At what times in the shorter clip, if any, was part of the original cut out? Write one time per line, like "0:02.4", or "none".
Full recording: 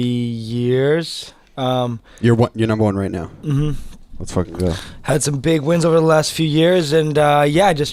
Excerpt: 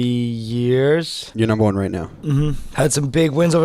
0:01.3
0:02.6